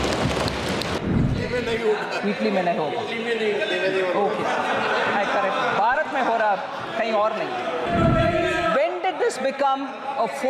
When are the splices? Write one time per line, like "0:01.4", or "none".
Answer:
0:01.0
0:07.9